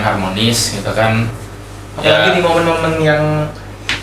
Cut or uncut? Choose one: uncut